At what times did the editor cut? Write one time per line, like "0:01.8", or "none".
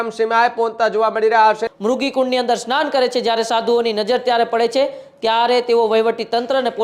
0:01.6

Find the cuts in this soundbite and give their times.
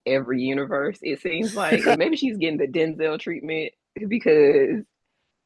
0:02.0

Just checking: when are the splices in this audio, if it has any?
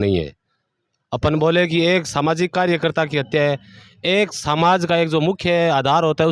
none

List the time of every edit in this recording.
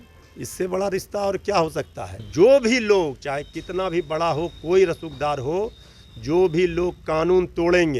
0:02.3

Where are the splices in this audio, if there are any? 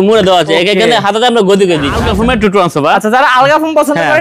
0:02.0

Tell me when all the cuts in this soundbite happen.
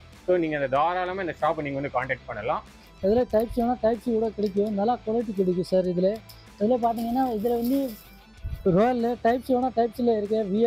0:02.7

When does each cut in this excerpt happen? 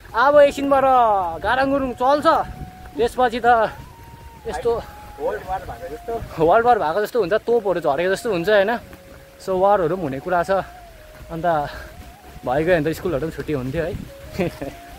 none

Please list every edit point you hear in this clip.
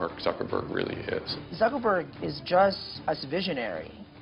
0:01.4
0:02.9

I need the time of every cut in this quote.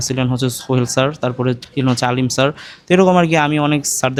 none

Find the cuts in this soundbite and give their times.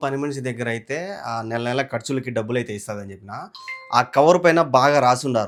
none

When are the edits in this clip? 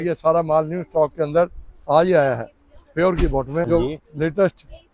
0:03.7

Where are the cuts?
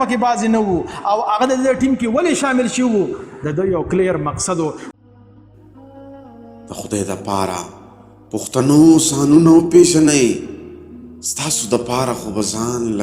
0:04.9

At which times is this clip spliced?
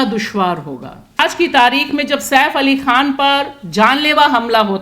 0:01.2

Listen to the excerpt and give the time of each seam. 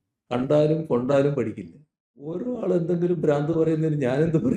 0:02.4

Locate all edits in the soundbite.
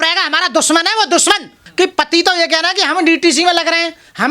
0:01.6

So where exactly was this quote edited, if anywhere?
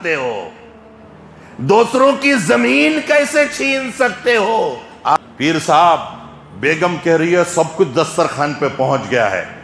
0:05.2

